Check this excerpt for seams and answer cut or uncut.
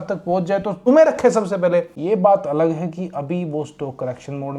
cut